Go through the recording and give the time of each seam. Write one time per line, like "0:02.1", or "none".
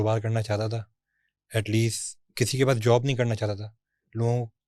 none